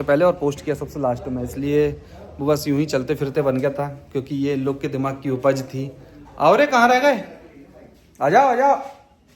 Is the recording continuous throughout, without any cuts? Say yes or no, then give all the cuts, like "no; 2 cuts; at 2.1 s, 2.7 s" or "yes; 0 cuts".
yes; 0 cuts